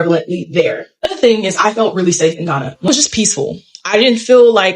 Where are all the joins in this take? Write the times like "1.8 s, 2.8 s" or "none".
2.9 s